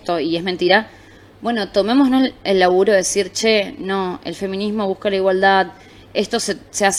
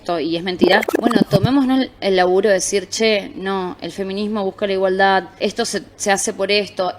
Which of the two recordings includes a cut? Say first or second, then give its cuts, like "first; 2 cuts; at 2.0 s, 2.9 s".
second; 2 cuts; at 0.9 s, 5.3 s